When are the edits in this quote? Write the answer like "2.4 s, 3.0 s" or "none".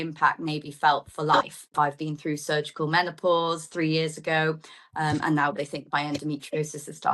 1.7 s